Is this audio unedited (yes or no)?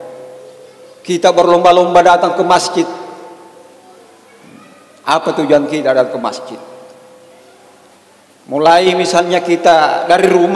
no